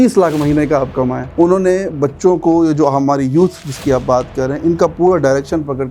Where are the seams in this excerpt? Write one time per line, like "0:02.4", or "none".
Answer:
0:01.2